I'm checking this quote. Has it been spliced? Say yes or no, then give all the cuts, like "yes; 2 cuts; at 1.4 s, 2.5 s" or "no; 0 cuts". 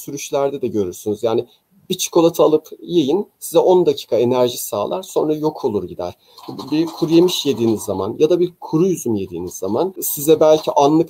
no; 0 cuts